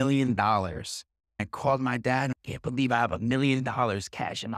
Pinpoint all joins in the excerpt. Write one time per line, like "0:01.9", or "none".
0:01.4
0:02.3